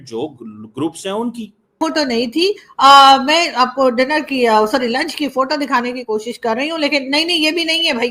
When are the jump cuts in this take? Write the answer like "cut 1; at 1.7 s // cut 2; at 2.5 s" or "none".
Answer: cut 1; at 1.8 s

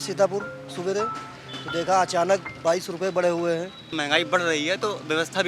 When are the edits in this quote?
cut 1; at 3.8 s

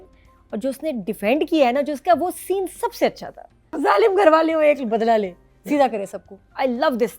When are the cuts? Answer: cut 1; at 3.7 s

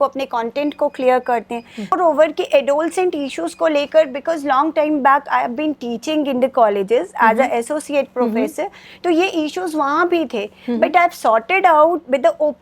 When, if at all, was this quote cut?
cut 1; at 1.9 s

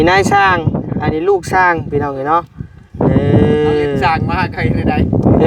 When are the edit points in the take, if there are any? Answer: none

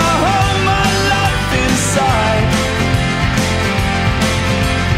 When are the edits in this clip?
cut 1; at 2.8 s

